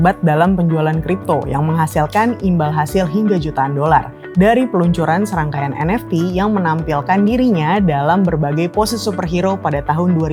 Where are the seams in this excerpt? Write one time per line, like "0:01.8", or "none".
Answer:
none